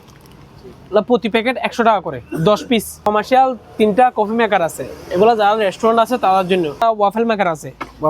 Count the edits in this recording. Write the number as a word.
two